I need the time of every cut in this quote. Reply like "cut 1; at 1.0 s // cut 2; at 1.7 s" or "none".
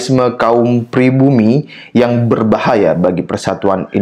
none